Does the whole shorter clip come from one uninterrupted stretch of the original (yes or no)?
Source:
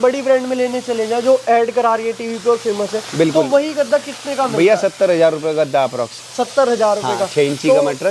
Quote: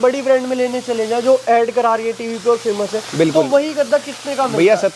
yes